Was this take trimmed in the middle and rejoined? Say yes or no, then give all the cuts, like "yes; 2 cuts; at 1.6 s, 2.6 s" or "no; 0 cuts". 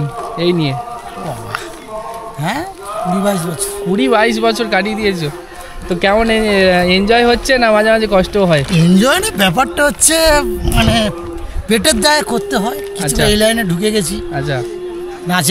no; 0 cuts